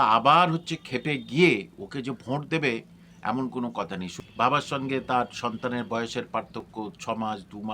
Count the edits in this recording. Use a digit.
1